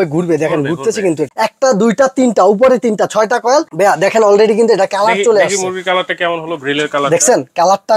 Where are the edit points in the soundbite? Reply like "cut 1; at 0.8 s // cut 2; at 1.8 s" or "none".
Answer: cut 1; at 1.3 s // cut 2; at 3.7 s